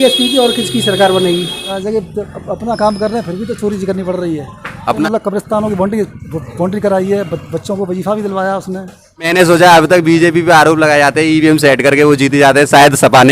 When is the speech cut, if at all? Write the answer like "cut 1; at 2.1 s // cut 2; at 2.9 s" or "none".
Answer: cut 1; at 1.8 s // cut 2; at 5.0 s // cut 3; at 9.3 s